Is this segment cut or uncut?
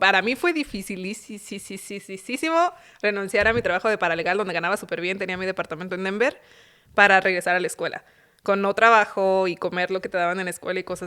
uncut